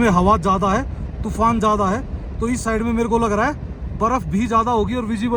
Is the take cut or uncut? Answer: uncut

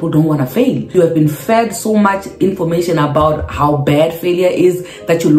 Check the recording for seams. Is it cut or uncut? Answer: cut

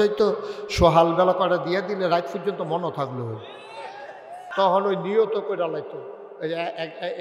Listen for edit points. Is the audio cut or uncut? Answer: cut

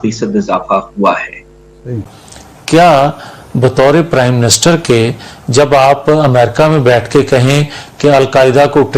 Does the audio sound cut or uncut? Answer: cut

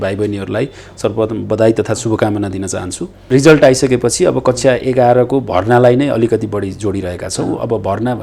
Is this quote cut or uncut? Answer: cut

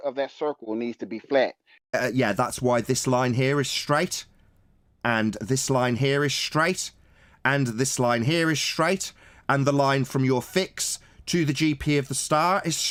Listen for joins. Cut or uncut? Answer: uncut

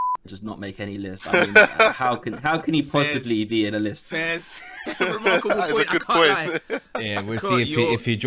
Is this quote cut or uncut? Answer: uncut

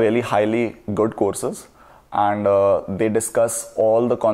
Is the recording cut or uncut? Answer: uncut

